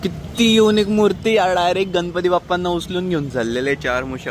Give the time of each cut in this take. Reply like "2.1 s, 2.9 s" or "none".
none